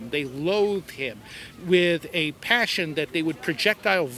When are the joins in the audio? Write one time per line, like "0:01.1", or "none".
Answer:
none